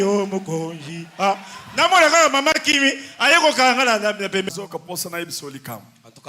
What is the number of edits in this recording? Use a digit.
1